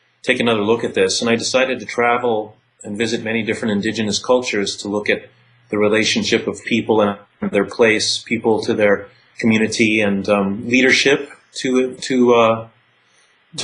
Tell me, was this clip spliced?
yes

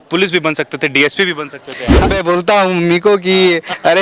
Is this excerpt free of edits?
no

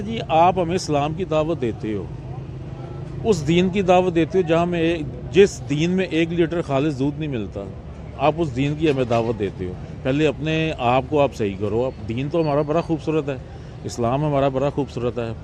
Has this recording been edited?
no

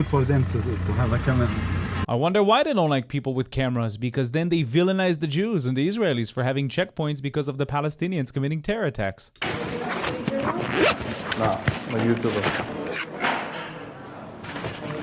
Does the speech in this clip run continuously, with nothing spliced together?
no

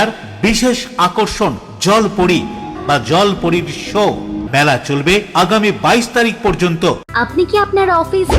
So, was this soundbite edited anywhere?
yes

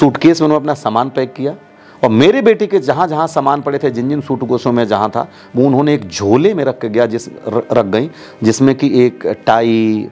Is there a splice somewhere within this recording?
no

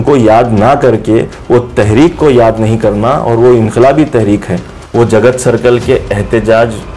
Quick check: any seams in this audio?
yes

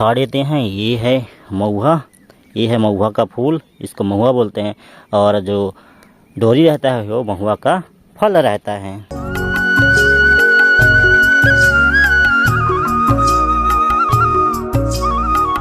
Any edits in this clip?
no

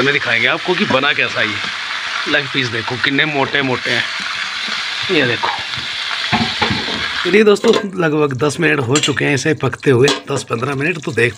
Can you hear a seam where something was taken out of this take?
yes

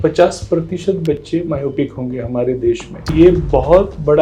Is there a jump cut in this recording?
yes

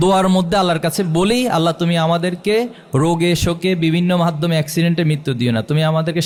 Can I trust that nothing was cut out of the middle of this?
yes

